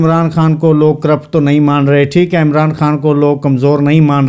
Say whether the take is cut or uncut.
uncut